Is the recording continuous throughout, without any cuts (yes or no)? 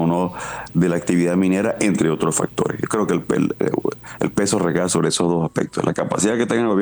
yes